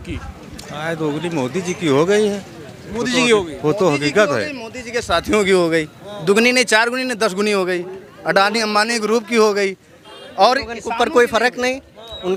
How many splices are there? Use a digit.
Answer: 0